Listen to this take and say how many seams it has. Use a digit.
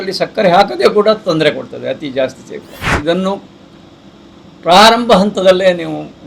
1